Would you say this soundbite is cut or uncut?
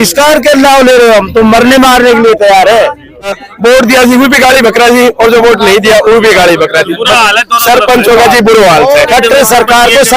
cut